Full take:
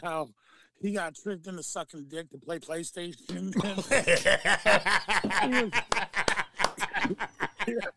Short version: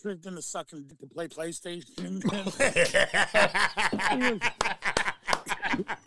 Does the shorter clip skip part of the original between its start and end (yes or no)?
yes